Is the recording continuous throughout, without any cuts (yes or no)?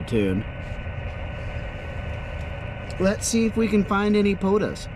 yes